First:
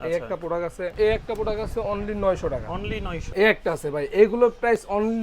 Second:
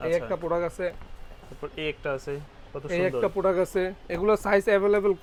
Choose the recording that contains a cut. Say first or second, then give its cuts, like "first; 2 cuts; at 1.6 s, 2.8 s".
first; 2 cuts; at 0.9 s, 3.2 s